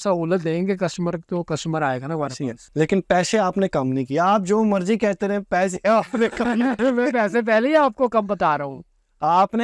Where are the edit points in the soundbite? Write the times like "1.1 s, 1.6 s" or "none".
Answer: 2.6 s